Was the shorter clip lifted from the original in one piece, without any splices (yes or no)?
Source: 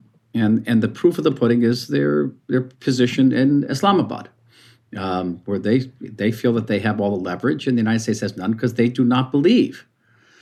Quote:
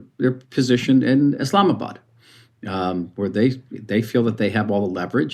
yes